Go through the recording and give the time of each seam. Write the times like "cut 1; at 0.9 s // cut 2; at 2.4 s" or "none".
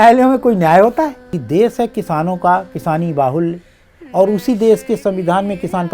cut 1; at 1.3 s